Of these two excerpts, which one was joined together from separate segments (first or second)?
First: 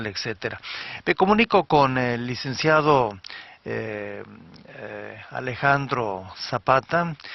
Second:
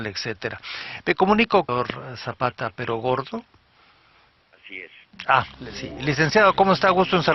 first